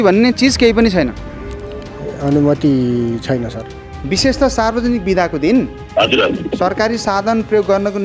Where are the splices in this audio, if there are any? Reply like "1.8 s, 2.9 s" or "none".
3.9 s, 5.8 s